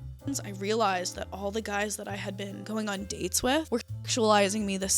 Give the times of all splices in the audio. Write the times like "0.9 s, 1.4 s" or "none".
2.6 s, 3.7 s